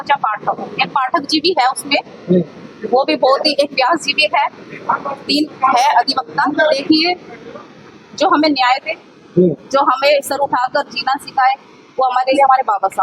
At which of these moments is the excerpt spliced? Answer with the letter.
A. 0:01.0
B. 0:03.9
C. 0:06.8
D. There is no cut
C